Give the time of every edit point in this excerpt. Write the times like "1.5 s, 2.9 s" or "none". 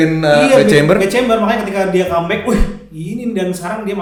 none